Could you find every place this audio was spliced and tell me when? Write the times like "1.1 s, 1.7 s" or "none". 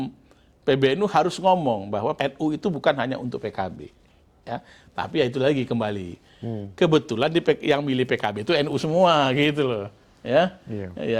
2.1 s